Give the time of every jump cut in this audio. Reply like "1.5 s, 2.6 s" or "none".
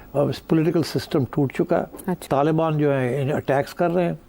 2.2 s